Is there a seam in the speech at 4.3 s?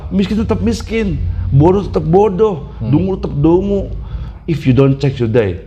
yes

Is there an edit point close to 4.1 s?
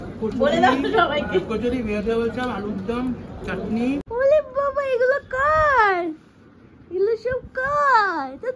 yes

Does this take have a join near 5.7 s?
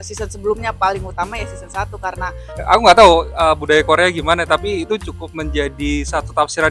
no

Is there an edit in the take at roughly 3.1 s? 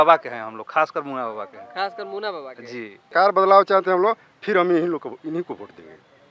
yes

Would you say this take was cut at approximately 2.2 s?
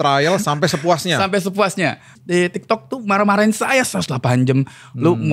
yes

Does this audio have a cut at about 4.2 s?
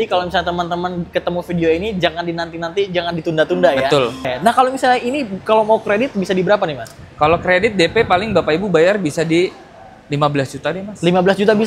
yes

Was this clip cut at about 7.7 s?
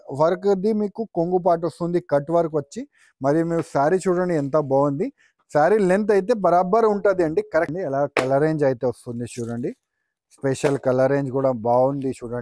yes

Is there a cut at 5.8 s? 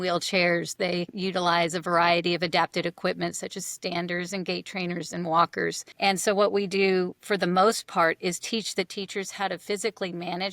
yes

